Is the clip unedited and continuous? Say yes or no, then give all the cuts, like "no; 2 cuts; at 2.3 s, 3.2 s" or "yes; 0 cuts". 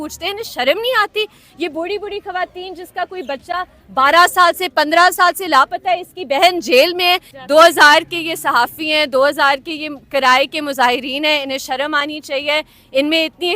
no; 1 cut; at 7.3 s